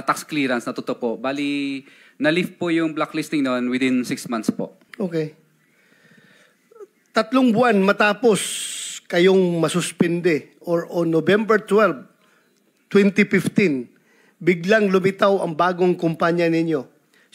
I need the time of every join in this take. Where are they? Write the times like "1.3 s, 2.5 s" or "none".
4.8 s

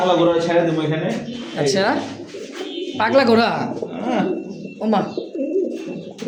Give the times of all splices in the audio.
none

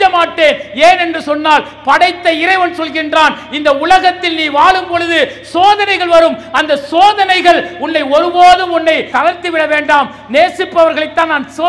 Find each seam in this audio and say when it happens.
9.1 s

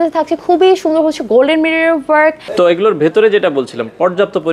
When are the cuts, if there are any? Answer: none

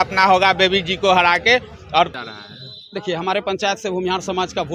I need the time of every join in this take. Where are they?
2.1 s

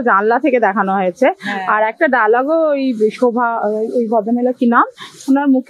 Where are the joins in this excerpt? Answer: none

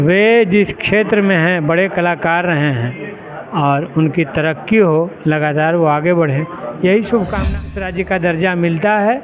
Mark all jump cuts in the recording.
7.7 s

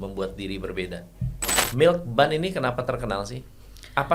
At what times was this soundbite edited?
1.6 s

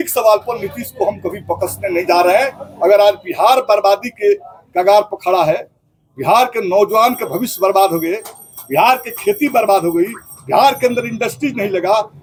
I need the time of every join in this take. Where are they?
none

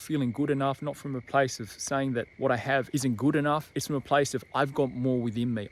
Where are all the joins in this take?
2.5 s, 3.7 s

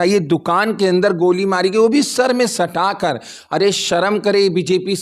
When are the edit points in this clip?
none

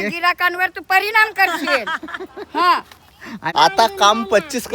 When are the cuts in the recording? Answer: 3.5 s

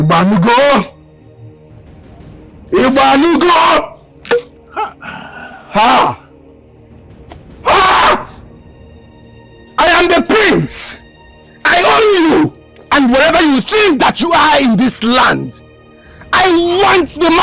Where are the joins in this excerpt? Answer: 1.2 s, 2.6 s

